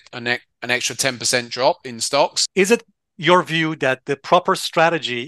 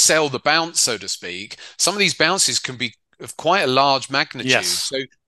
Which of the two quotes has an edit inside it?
first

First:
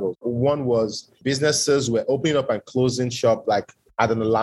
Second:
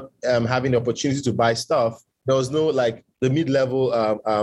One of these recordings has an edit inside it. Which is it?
second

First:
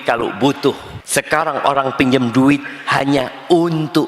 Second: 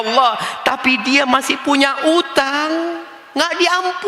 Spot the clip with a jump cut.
first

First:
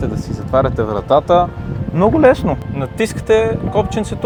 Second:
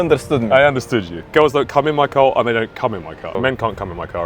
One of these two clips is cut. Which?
second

